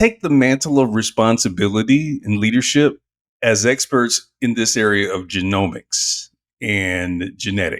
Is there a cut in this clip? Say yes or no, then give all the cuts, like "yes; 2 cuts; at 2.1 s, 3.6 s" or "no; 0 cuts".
no; 0 cuts